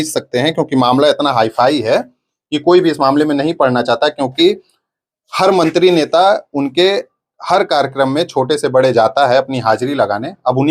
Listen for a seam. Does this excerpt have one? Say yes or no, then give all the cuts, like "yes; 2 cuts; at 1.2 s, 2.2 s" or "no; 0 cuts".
no; 0 cuts